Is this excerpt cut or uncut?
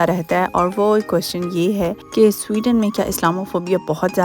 cut